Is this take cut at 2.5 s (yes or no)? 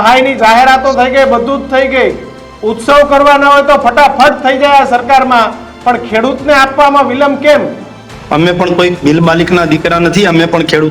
no